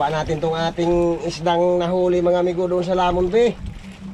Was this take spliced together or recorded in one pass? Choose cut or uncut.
uncut